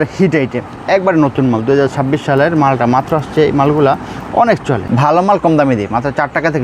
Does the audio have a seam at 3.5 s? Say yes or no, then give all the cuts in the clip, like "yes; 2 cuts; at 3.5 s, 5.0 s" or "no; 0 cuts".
no; 1 cut; at 4.8 s